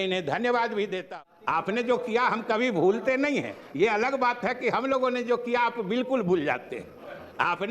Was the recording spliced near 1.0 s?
yes; 1 cut; at 1.0 s

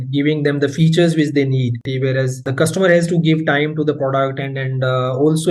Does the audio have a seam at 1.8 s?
yes; 1 cut; at 1.8 s

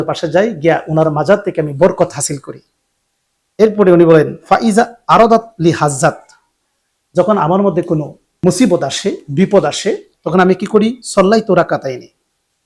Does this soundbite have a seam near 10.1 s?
yes; 2 cuts; at 8.4 s, 10.1 s

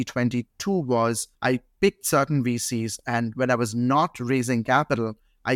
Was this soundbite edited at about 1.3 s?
yes; 1 cut; at 1.3 s

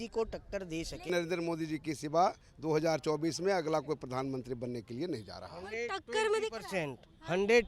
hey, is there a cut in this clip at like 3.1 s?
no; 1 cut; at 1.1 s

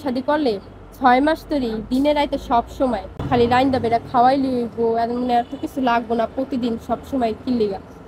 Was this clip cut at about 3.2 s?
yes; 1 cut; at 3.2 s

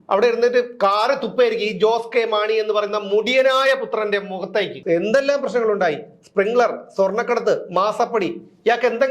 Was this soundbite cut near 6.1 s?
no; 1 cut; at 4.8 s

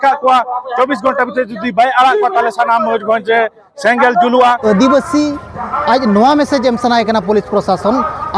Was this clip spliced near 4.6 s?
yes; 1 cut; at 4.6 s

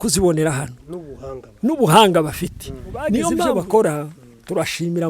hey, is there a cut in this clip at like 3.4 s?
yes; 1 cut; at 3.4 s

